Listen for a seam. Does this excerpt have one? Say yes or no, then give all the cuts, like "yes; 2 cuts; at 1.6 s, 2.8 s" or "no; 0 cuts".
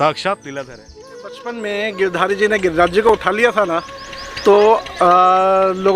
yes; 1 cut; at 1.2 s